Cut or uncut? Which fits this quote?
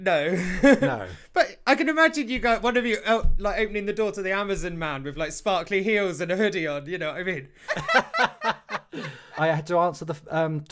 cut